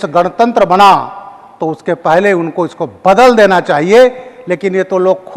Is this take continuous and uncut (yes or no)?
yes